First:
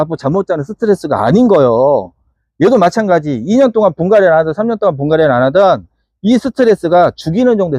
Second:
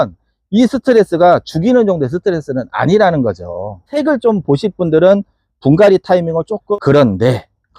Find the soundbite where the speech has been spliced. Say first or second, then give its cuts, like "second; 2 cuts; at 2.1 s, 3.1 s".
second; 2 cuts; at 3.9 s, 6.6 s